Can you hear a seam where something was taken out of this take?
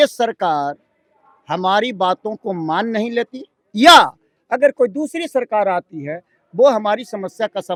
no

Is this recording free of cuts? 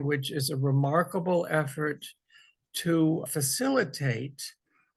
yes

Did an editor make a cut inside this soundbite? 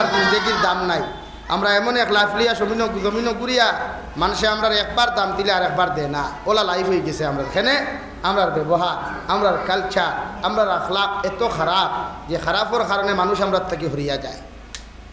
no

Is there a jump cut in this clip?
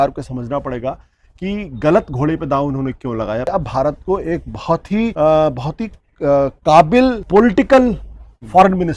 yes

